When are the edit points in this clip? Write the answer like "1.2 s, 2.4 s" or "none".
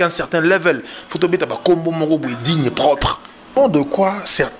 3.5 s